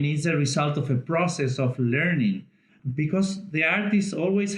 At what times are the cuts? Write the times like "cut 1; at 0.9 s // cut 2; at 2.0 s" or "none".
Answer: cut 1; at 2.8 s

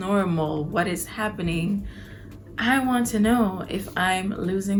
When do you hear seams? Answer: none

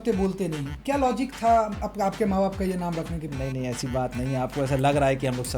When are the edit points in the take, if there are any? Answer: cut 1; at 3.2 s

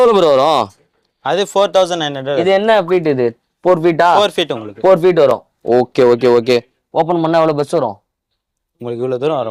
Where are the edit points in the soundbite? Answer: none

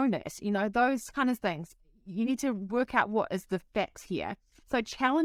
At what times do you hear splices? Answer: none

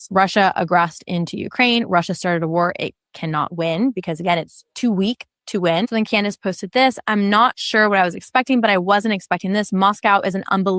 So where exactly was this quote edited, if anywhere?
none

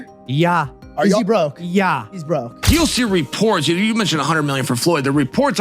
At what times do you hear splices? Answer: cut 1; at 2.6 s

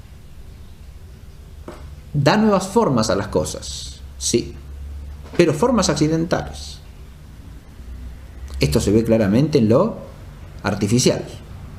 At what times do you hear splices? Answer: none

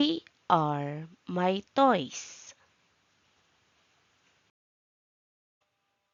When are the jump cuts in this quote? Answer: none

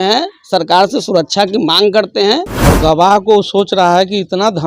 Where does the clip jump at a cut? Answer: cut 1; at 2.6 s

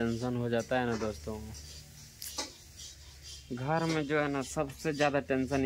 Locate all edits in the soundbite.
none

